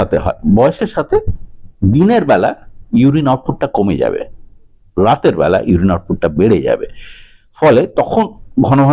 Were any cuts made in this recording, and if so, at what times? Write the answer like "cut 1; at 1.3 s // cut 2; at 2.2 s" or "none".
none